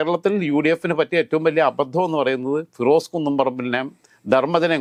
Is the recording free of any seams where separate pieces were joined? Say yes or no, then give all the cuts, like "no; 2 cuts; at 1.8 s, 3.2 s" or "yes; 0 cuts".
yes; 0 cuts